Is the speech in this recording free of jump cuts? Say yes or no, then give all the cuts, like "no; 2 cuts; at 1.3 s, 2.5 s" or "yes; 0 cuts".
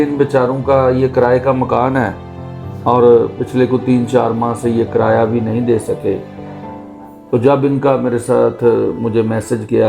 yes; 0 cuts